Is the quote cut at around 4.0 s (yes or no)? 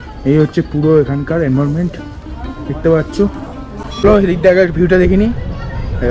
yes